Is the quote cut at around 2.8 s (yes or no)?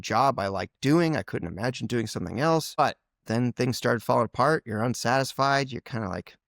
yes